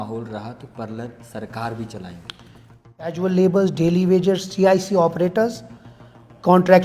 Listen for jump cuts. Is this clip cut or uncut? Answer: cut